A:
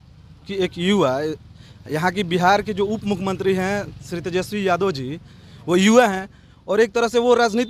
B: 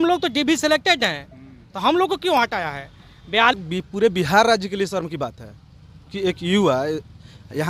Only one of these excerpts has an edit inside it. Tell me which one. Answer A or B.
B